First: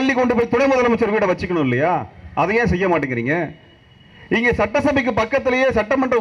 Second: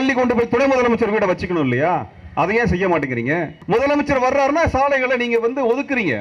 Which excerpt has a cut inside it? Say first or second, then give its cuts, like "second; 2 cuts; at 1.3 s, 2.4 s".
second; 1 cut; at 3.5 s